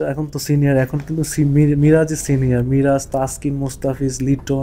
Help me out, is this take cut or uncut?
uncut